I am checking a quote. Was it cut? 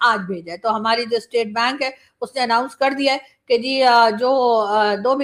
no; 0 cuts

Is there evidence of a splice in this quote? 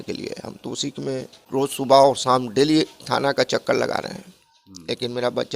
yes; 1 cut; at 1.4 s

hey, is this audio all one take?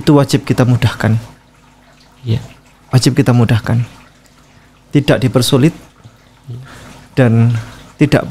yes; 0 cuts

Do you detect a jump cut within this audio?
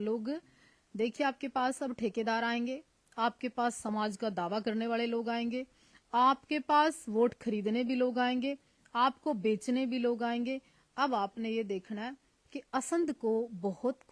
no; 0 cuts

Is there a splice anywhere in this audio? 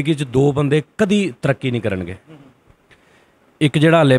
no; 0 cuts

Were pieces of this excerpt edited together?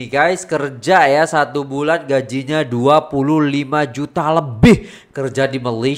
no; 0 cuts

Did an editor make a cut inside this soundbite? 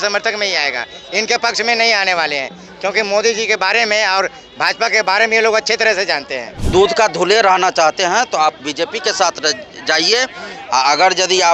yes; 1 cut; at 6.6 s

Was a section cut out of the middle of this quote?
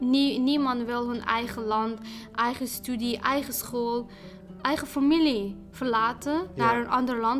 no; 0 cuts

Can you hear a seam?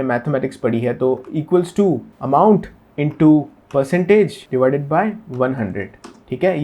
yes; 2 cuts; at 2.1 s, 4.4 s

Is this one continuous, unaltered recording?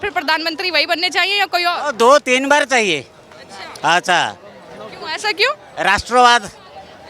yes; 0 cuts

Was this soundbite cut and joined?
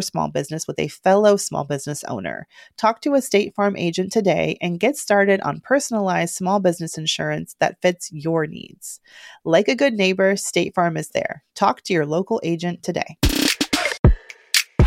yes; 1 cut; at 13.9 s

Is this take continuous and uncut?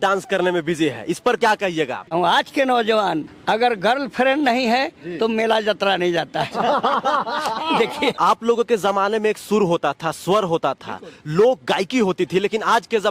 no; 2 cuts; at 2.0 s, 8.2 s

